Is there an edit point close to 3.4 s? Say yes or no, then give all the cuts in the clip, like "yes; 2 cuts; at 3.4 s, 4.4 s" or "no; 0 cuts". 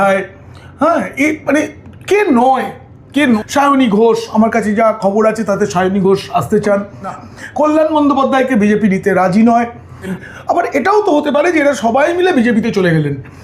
yes; 3 cuts; at 3.4 s, 7.2 s, 10.2 s